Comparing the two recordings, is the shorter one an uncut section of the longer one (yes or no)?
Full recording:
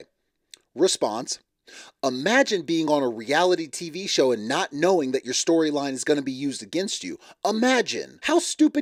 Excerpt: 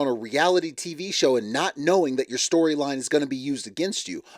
yes